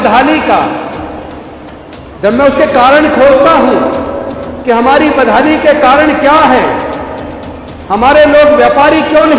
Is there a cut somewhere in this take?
no; 0 cuts

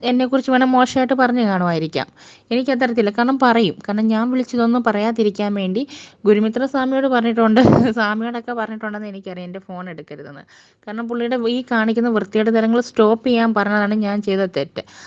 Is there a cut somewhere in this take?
no; 0 cuts

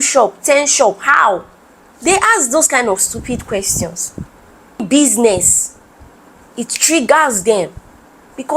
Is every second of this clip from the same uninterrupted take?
no; 1 cut; at 4.8 s

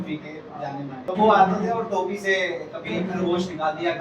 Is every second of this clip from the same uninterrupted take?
no; 1 cut; at 1.0 s

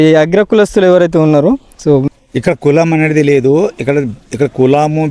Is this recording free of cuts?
no; 1 cut; at 2.1 s

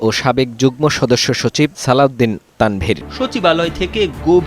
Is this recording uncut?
no; 1 cut; at 3.1 s

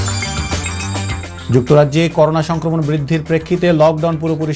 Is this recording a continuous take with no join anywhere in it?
no; 1 cut; at 1.2 s

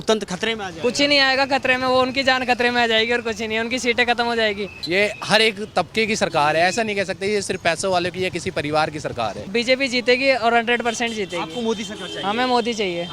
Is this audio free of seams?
no; 2 cuts; at 4.7 s, 9.5 s

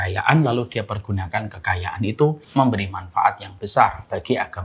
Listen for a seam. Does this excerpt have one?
yes; 1 cut; at 2.4 s

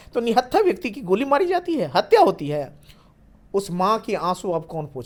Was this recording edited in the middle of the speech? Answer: no; 0 cuts

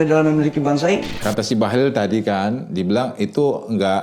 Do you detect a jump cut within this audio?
yes; 1 cut; at 1.2 s

